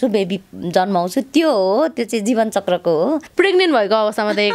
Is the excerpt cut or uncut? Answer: cut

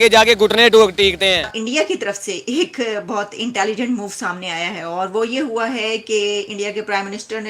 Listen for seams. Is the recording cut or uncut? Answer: cut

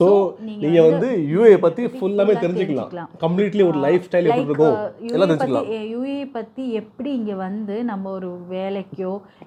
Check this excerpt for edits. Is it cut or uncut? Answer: uncut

